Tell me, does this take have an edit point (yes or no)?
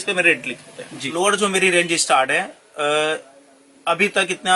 yes